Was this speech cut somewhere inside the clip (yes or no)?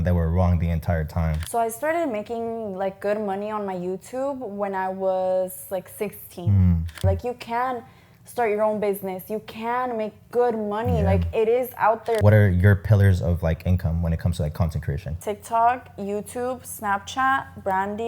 yes